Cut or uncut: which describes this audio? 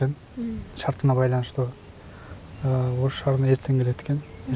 uncut